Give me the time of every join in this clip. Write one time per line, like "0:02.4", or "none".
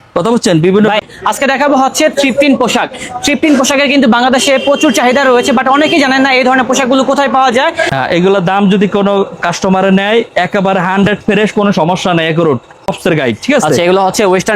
0:01.0
0:07.9
0:12.9